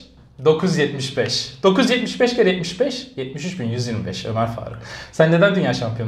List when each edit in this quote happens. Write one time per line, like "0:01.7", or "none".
none